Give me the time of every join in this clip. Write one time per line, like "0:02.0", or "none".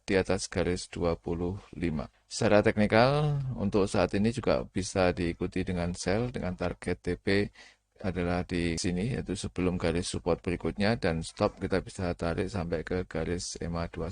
0:02.2
0:08.8